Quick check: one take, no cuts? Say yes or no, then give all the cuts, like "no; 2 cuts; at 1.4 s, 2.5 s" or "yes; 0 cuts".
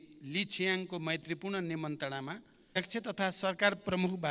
no; 1 cut; at 2.8 s